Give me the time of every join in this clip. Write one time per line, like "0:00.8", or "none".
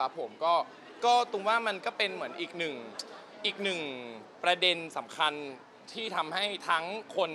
none